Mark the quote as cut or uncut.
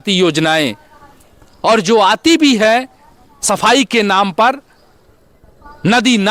uncut